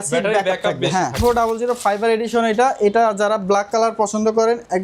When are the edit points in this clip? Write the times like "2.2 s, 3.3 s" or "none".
1.2 s